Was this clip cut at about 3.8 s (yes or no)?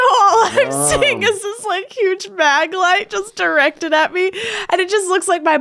no